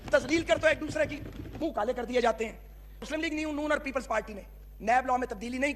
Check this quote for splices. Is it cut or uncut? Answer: cut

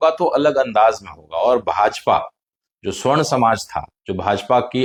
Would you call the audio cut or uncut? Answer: uncut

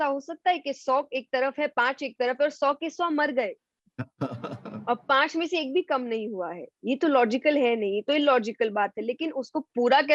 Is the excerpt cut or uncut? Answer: uncut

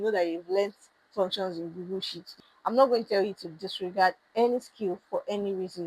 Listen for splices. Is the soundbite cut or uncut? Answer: cut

